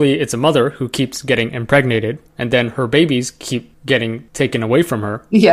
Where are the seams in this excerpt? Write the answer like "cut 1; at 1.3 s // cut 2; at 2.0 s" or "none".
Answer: none